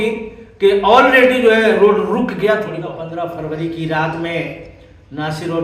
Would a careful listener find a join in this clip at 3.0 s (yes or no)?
yes